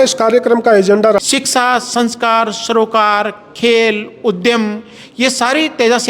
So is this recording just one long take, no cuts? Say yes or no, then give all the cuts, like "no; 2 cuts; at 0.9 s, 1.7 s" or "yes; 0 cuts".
no; 1 cut; at 1.2 s